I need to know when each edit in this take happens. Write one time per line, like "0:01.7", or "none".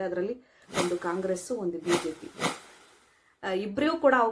0:02.8